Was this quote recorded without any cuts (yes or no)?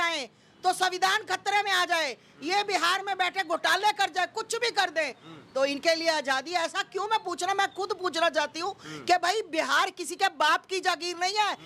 yes